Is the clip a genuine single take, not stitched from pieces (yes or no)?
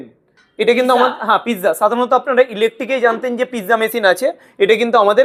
yes